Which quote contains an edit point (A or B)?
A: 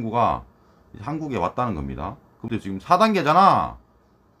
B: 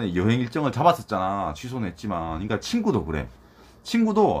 A